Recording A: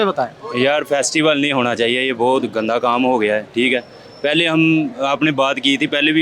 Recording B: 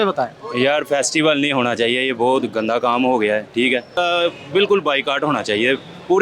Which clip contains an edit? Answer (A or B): B